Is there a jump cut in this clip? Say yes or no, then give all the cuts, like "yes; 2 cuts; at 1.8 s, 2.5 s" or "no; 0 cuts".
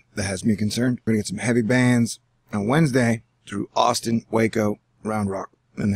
yes; 1 cut; at 1.0 s